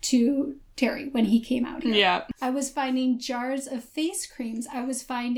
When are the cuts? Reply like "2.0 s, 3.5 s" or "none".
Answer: 2.3 s